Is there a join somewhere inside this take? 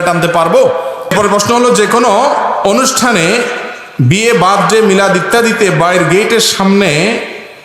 yes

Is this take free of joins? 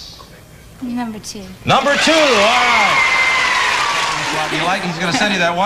no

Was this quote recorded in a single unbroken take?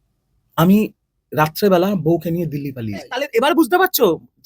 no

